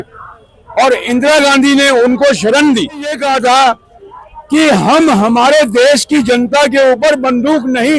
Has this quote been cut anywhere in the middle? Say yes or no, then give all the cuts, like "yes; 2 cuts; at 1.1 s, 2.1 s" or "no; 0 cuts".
yes; 1 cut; at 3.2 s